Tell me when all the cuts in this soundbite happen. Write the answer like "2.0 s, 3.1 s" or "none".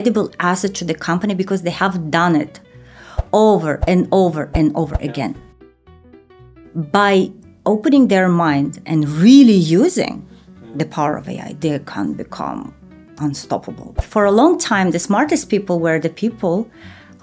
13.9 s